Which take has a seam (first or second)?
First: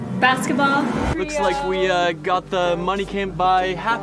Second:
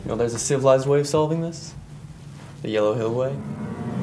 first